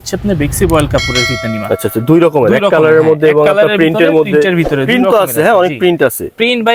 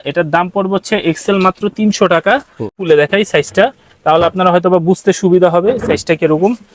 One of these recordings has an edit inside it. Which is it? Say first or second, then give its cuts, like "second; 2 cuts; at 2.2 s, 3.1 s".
second; 1 cut; at 2.8 s